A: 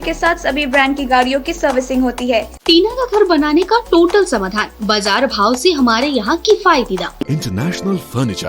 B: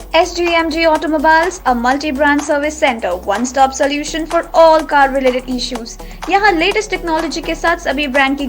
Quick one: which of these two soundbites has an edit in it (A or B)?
A